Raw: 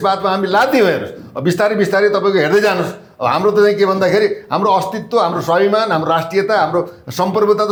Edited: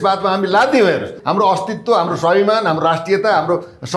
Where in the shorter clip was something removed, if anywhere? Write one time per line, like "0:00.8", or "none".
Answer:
0:01.2